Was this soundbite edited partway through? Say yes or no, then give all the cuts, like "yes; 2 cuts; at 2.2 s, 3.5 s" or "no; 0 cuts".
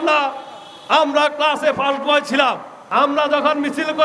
yes; 1 cut; at 2.7 s